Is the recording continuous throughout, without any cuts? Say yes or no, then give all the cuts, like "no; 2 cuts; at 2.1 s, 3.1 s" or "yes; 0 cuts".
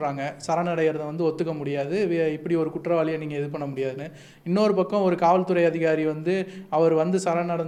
yes; 0 cuts